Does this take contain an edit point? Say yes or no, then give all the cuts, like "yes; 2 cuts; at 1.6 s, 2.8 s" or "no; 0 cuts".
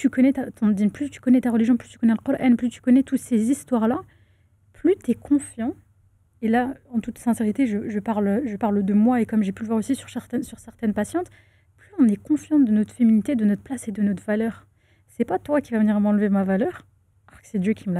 no; 0 cuts